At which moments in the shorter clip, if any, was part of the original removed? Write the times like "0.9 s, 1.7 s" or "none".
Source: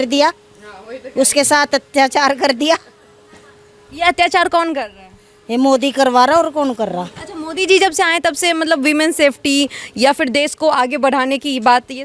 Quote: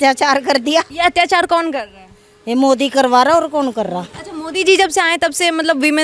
0.9 s